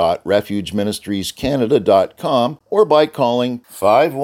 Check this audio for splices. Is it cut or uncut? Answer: cut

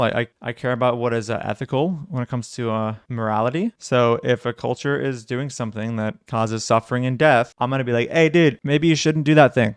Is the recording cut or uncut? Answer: cut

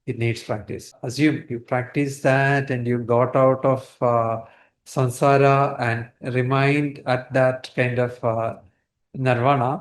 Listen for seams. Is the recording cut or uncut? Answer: cut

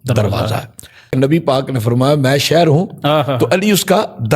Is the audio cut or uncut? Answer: cut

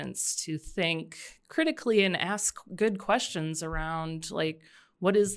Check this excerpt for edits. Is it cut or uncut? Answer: uncut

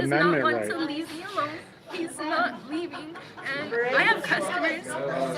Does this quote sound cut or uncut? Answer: uncut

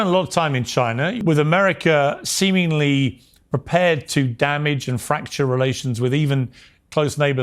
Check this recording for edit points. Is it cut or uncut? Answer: cut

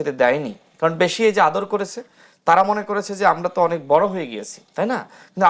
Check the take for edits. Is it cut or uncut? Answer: uncut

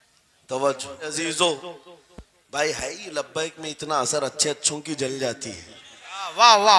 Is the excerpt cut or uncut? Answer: cut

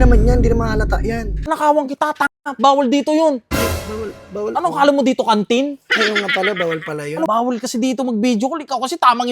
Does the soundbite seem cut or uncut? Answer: cut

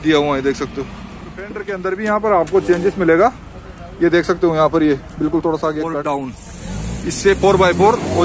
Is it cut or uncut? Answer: cut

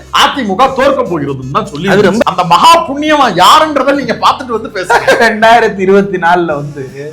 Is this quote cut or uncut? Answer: cut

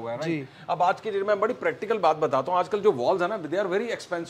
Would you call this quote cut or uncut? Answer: uncut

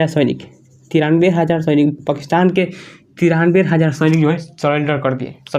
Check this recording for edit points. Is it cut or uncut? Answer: uncut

